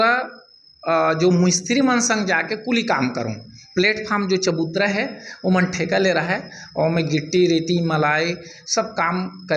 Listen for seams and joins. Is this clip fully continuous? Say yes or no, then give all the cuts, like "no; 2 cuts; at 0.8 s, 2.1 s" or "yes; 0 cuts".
yes; 0 cuts